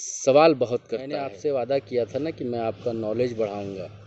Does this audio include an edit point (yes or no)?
yes